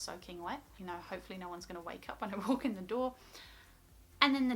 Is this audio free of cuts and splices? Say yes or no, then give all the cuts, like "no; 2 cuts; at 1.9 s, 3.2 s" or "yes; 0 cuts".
no; 1 cut; at 1.0 s